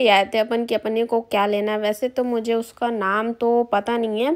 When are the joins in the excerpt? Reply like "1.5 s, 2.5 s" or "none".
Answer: none